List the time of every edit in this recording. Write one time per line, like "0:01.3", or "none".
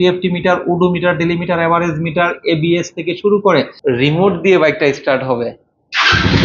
0:03.7